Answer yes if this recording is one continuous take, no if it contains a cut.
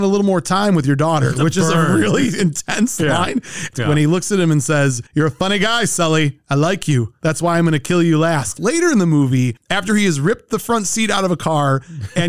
no